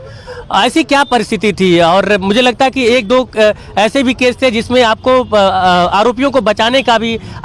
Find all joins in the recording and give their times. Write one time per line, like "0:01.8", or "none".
none